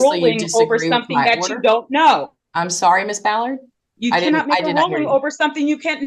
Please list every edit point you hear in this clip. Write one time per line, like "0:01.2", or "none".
none